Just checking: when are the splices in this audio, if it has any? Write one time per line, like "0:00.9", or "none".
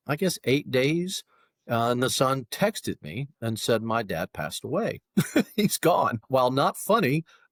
none

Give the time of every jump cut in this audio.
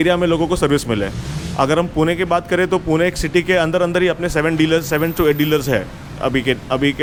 none

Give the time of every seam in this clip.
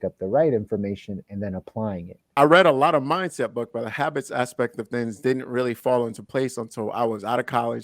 0:02.2

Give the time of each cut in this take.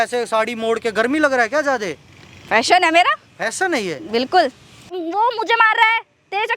0:04.8

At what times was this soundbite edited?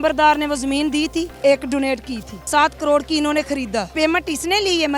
0:01.3
0:02.5
0:03.9

